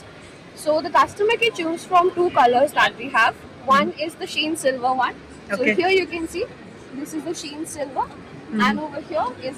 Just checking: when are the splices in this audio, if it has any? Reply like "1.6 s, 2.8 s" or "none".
none